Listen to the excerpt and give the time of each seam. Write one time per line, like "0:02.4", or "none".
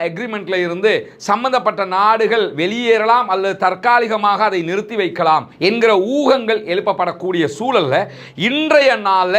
none

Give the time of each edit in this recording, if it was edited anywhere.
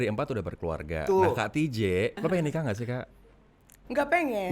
0:02.2

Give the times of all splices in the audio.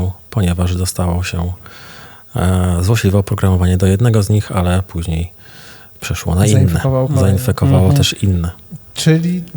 none

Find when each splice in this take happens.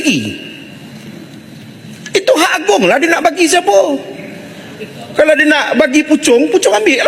none

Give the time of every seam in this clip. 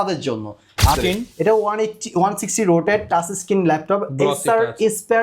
0:00.9

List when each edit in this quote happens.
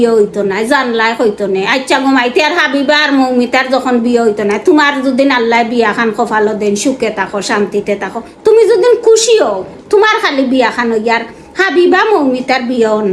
none

